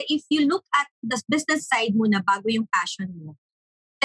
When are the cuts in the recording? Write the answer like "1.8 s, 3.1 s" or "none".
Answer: 0.9 s